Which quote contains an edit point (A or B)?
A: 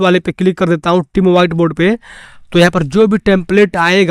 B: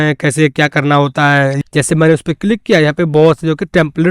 B